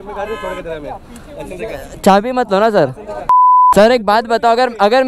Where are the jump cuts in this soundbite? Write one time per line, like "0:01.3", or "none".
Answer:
0:03.6

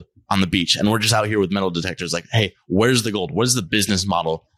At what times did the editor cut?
none

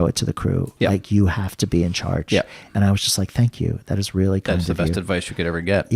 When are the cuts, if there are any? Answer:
0:02.7

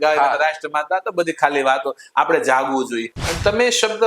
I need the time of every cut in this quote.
0:03.2

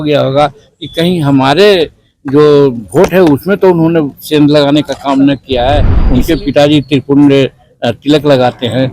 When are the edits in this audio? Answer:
0:06.0

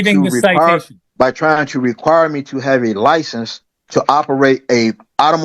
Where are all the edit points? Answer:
0:01.0

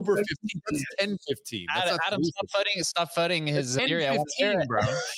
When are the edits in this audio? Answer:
0:03.8

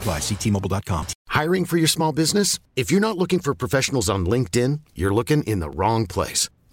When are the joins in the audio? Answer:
0:01.1

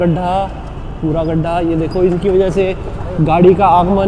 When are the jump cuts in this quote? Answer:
none

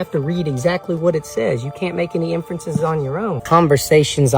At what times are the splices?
0:03.4

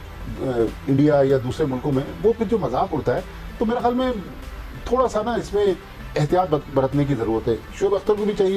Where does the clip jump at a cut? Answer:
none

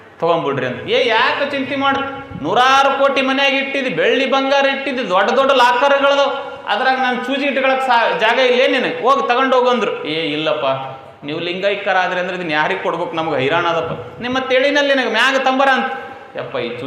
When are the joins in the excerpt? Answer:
none

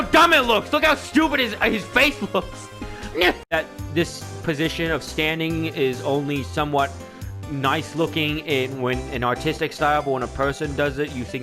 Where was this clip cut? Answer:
0:03.5

